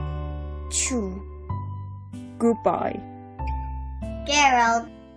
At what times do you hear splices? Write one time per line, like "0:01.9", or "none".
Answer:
none